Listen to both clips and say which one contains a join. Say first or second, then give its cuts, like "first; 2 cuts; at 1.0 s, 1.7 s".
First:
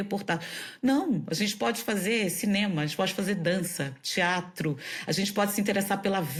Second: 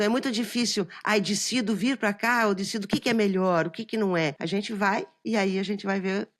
second; 1 cut; at 4.4 s